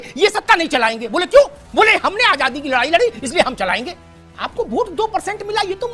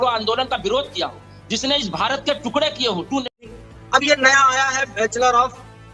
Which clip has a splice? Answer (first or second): second